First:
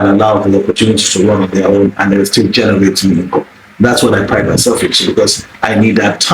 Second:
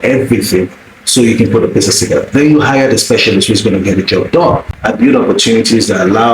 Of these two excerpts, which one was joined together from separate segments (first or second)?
second